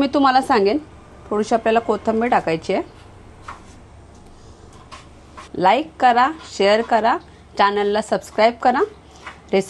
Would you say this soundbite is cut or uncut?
cut